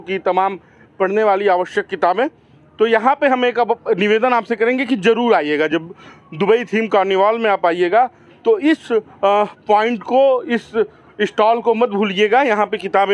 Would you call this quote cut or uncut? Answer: uncut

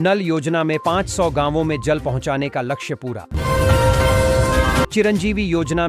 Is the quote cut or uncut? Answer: uncut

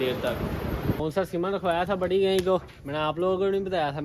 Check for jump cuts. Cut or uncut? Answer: cut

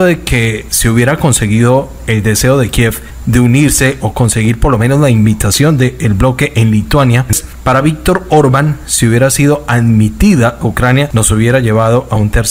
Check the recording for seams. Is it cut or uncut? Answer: cut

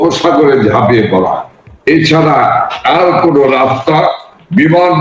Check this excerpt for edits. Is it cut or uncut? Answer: uncut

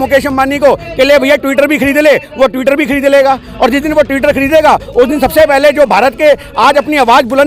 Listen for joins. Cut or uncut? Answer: uncut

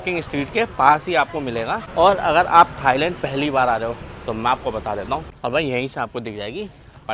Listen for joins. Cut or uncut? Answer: cut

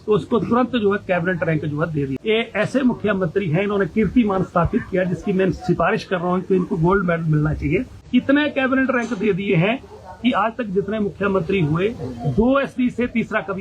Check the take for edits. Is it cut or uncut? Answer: cut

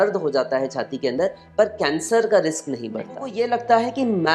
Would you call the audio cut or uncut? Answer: cut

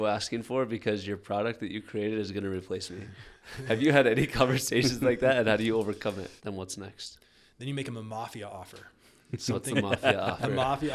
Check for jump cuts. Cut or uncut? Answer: cut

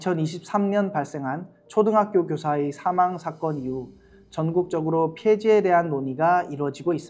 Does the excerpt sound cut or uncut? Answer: uncut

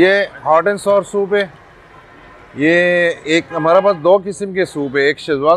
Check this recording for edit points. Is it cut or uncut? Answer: uncut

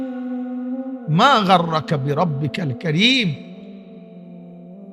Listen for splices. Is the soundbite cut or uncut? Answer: uncut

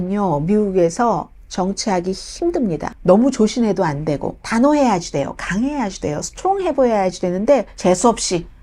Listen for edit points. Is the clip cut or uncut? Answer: cut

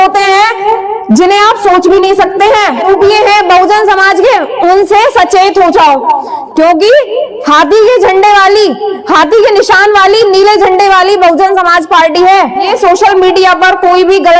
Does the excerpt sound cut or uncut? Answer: cut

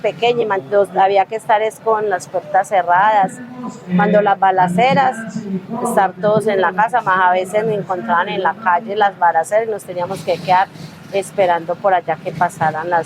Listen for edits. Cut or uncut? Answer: uncut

